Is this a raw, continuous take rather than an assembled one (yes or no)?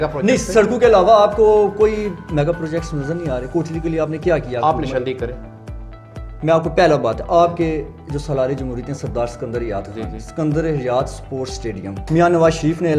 no